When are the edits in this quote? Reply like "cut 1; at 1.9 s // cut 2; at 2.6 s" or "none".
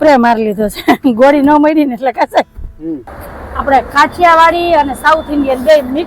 cut 1; at 3.0 s